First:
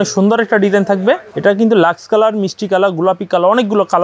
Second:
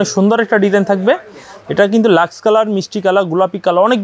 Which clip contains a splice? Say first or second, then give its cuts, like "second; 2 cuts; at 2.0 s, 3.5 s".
first; 1 cut; at 1.3 s